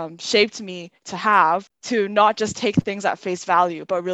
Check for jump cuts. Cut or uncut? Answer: cut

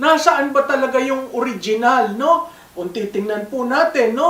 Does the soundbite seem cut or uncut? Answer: uncut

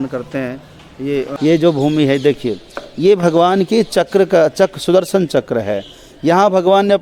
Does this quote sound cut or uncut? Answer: cut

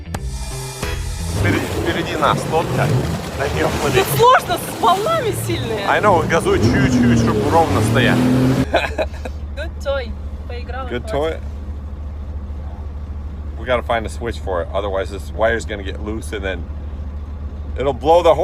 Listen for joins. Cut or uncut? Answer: cut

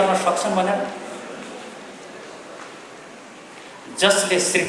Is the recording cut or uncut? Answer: uncut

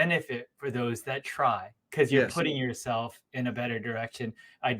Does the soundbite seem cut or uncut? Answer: cut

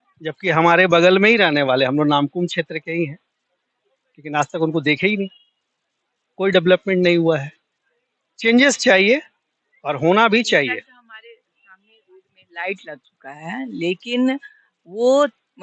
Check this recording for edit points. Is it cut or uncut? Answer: uncut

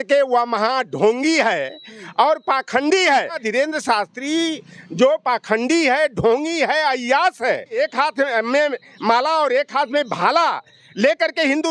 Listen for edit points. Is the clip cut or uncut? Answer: cut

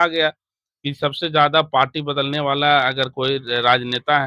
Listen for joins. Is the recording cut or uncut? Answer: uncut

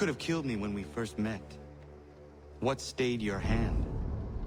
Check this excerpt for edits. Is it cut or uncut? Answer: uncut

